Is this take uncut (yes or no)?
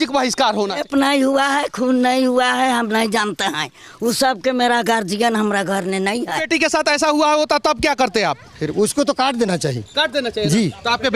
no